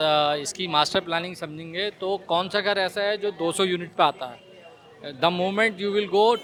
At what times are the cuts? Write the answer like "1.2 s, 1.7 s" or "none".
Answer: none

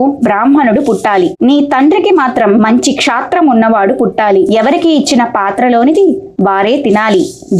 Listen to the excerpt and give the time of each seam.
none

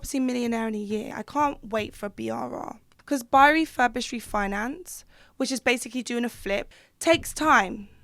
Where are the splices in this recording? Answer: 1.1 s, 2.9 s, 6.7 s

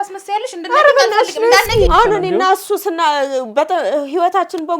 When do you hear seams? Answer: 1.9 s

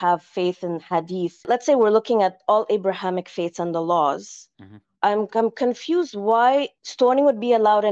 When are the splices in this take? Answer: 1.5 s

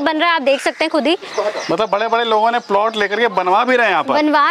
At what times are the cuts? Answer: none

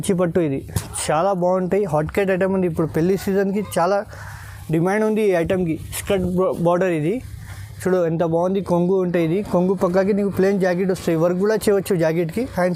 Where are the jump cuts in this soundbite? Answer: none

